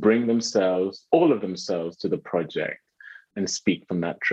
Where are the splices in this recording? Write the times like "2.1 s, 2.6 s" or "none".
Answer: 3.3 s